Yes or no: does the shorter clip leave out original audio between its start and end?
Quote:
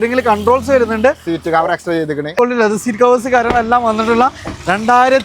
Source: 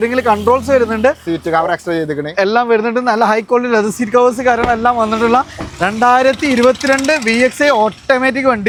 yes